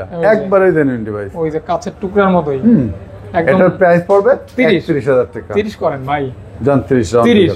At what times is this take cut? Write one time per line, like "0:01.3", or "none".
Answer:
none